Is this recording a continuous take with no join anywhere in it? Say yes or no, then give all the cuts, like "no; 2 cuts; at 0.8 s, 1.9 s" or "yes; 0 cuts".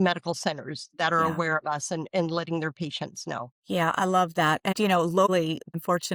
yes; 0 cuts